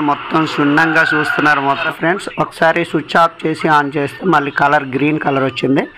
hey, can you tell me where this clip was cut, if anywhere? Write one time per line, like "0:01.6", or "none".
0:01.9